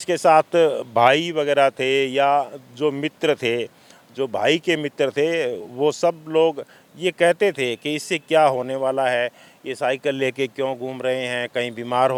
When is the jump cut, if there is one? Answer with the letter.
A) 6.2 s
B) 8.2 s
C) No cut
C